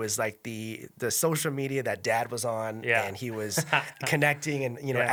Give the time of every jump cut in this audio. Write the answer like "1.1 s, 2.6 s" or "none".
none